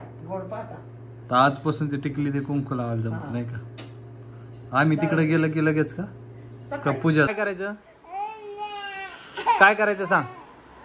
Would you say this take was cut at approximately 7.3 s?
yes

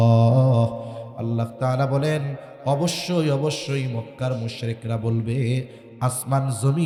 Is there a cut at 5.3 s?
no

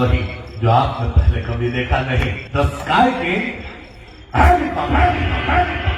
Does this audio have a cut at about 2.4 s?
yes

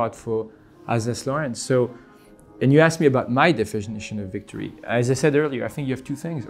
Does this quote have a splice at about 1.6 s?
no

